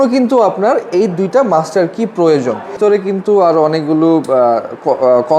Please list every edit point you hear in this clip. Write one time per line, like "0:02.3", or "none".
0:02.8